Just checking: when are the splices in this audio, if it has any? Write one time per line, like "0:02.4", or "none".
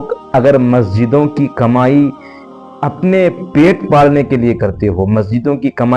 none